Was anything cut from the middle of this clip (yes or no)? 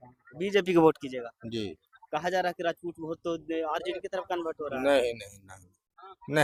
no